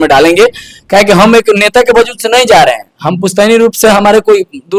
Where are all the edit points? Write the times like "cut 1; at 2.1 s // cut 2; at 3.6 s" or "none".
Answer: none